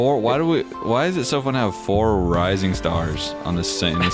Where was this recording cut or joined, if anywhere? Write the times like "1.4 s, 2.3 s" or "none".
none